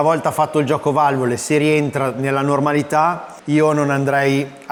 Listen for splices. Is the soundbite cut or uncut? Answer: uncut